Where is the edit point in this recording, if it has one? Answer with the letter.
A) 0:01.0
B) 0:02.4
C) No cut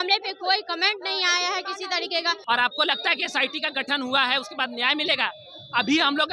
B